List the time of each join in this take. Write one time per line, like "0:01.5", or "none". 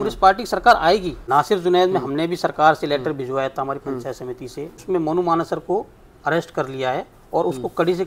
0:01.2
0:04.8